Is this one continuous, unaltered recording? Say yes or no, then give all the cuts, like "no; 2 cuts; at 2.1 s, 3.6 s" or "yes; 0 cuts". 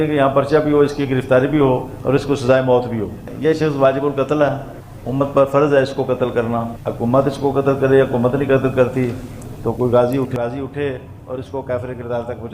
no; 1 cut; at 10.3 s